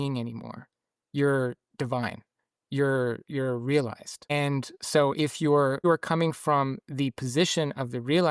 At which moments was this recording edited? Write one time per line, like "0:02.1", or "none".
0:04.3
0:05.8

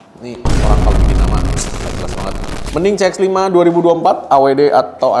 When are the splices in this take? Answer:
none

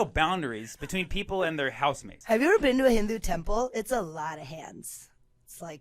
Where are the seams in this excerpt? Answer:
0:02.1

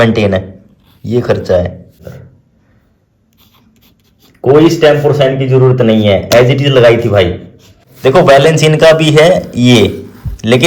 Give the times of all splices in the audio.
0:02.1
0:07.9

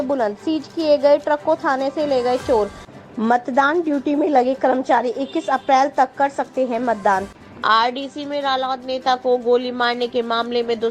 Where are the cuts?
0:02.9
0:07.4

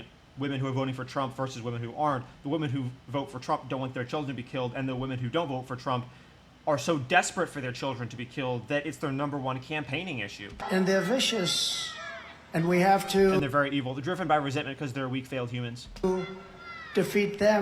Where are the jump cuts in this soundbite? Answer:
0:10.6

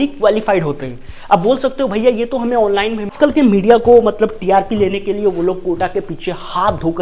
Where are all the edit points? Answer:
0:03.2

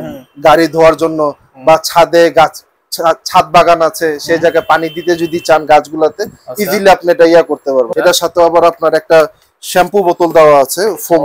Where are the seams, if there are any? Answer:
0:07.9

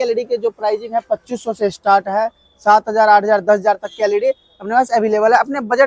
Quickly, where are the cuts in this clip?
none

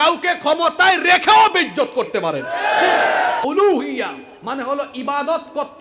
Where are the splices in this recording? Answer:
0:03.4

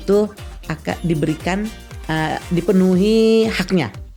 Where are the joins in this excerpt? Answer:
none

